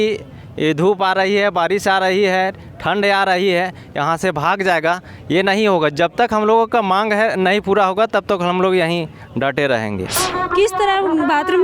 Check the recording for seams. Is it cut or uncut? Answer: cut